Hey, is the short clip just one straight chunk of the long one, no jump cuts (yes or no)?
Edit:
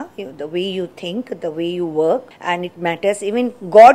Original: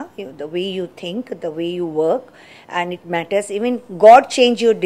no